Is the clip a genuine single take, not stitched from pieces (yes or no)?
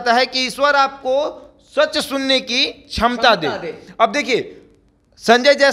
yes